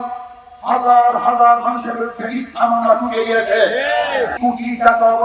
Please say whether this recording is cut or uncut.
cut